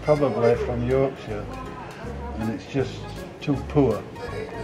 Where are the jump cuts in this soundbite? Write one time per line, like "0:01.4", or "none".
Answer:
none